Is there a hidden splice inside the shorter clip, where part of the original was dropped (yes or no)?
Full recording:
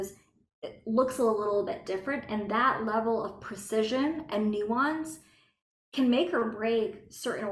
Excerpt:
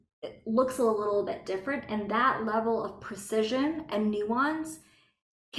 no